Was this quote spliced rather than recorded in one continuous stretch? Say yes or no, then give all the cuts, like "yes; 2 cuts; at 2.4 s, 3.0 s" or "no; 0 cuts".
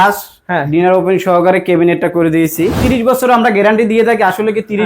yes; 1 cut; at 2.8 s